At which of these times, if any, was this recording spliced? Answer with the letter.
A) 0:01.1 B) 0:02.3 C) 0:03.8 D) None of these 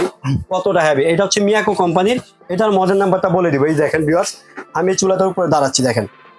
D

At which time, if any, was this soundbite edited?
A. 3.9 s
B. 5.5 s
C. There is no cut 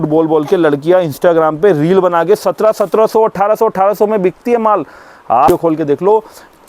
B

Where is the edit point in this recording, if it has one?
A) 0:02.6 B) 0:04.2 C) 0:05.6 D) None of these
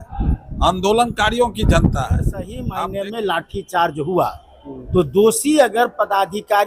A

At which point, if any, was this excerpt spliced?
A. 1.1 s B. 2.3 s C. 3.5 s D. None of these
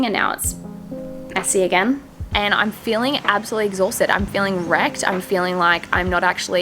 B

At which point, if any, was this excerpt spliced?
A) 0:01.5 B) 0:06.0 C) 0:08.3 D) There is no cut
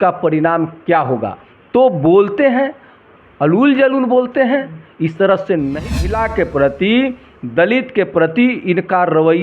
B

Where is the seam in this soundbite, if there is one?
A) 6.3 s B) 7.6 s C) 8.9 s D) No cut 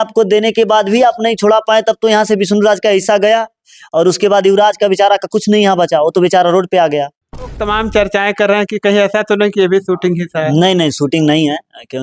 B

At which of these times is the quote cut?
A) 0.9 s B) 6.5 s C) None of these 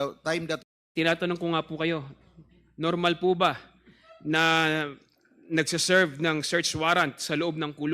A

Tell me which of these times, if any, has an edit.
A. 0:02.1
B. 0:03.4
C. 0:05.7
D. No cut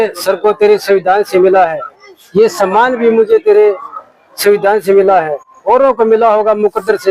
D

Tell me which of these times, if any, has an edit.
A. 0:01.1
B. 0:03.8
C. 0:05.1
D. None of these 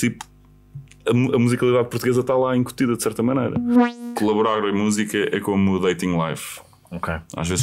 B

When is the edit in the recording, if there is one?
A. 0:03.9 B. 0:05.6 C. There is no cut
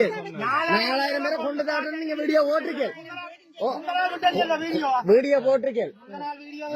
C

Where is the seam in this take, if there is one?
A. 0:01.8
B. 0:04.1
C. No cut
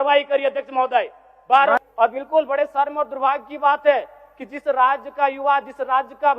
A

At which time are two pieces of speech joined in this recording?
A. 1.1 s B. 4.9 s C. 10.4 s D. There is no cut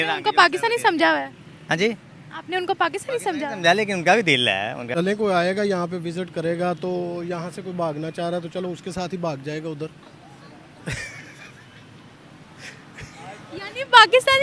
B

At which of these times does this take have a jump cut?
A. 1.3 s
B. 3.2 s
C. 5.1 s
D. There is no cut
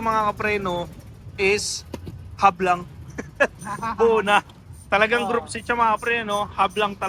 D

